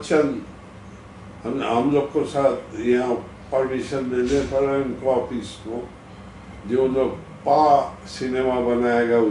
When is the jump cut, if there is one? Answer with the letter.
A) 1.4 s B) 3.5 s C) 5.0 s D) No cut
D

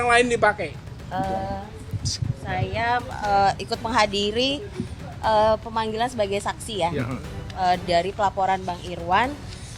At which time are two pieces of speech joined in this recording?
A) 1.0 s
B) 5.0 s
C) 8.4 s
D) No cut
A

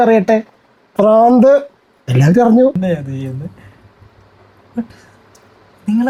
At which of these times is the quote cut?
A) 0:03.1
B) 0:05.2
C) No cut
C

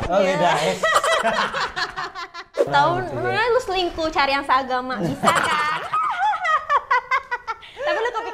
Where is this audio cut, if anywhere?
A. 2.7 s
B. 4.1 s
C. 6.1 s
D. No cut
A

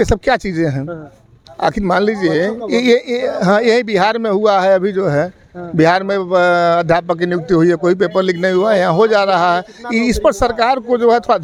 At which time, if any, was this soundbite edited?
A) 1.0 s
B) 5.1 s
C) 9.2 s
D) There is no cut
D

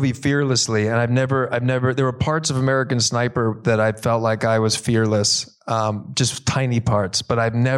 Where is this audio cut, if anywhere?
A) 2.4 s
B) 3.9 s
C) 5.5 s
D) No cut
D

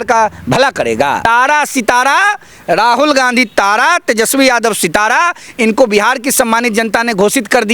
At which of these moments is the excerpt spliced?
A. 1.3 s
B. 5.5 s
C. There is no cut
A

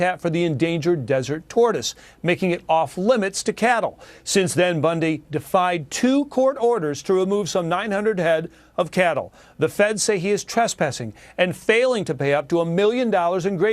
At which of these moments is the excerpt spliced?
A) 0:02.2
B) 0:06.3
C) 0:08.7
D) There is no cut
B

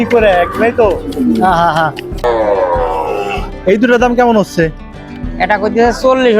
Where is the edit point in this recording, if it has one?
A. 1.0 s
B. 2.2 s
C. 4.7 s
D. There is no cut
B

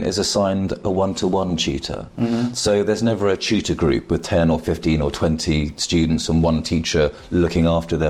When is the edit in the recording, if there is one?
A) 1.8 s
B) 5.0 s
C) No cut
C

